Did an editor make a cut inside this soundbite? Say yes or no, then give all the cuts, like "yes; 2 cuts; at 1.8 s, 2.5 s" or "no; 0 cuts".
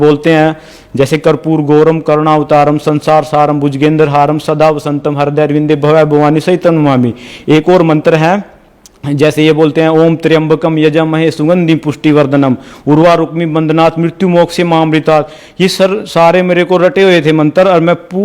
no; 0 cuts